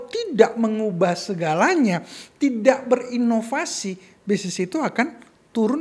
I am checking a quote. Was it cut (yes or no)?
no